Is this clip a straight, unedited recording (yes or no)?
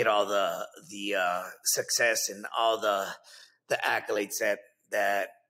yes